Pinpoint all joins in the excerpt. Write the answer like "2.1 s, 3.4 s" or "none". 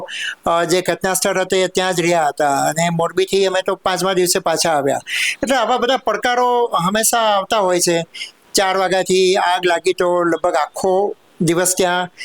8.3 s